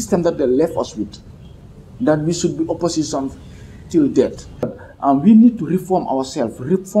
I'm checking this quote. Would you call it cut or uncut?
cut